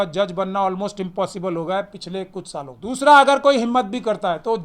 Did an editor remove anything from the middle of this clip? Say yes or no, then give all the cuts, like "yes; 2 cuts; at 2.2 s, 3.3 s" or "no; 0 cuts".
yes; 1 cut; at 2.8 s